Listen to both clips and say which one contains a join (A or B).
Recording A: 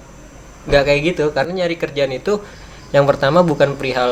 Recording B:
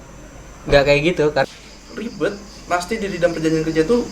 B